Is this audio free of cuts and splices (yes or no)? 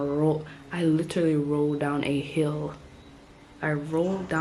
yes